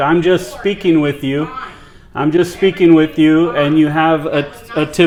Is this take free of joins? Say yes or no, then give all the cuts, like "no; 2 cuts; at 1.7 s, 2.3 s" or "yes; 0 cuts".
yes; 0 cuts